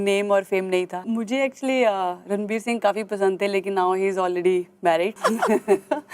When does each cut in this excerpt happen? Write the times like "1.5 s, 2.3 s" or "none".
1.0 s, 5.1 s

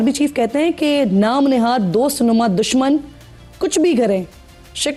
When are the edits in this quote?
none

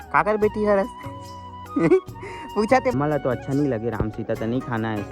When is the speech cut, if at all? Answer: 2.9 s

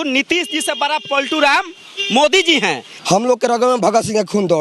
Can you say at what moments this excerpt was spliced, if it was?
2.9 s

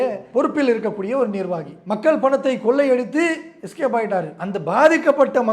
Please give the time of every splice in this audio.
1.7 s, 4.4 s

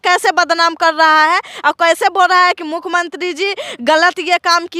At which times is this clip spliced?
none

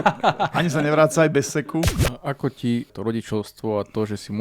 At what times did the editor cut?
2.0 s, 2.9 s

